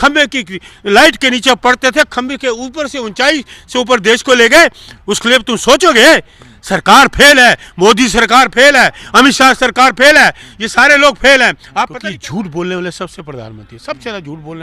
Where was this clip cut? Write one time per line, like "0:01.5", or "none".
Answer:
0:12.0